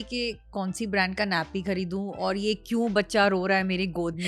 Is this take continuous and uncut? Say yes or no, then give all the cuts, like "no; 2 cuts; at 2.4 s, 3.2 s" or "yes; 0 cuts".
yes; 0 cuts